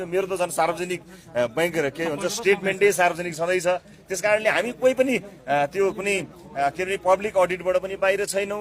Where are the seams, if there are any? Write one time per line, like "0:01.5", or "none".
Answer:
none

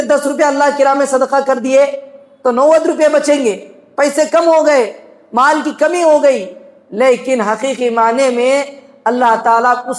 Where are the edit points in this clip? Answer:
none

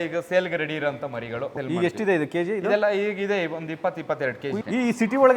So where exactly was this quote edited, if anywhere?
0:01.5
0:04.5

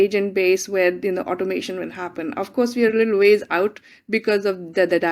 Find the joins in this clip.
none

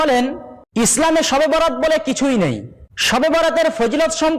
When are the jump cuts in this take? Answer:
0:00.9
0:03.2

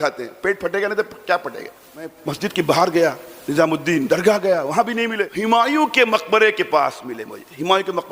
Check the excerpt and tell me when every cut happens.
0:02.2
0:05.3

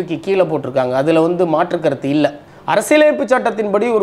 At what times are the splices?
0:02.5

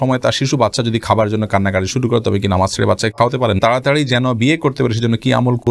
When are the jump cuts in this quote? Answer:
0:03.6

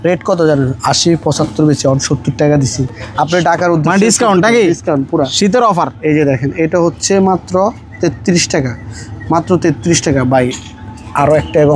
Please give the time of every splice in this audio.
none

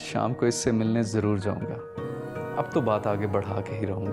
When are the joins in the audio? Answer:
none

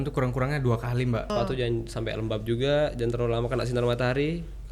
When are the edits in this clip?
0:01.3

